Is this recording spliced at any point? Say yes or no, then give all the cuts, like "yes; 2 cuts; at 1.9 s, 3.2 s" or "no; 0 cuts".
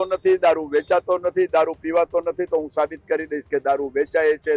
no; 0 cuts